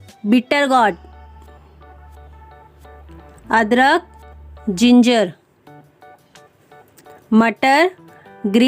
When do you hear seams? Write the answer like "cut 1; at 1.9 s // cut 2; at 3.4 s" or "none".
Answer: cut 1; at 1.1 s // cut 2; at 3.4 s